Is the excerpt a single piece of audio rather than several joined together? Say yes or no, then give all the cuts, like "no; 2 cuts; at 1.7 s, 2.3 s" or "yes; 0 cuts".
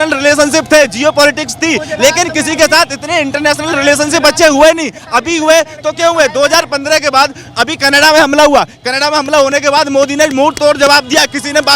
yes; 0 cuts